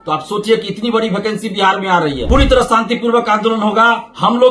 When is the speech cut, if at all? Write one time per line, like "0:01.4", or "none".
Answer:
0:02.2